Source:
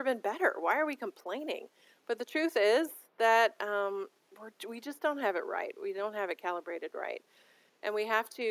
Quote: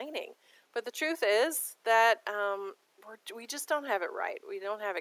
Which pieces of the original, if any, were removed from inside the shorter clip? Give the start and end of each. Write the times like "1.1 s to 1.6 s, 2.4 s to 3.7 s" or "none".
none